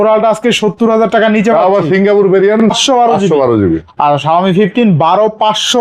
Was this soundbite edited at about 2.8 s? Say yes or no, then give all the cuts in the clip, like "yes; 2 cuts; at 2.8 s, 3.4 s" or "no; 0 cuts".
yes; 1 cut; at 2.8 s